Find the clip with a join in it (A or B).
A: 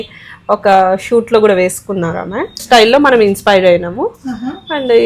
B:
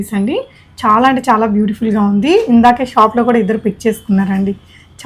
A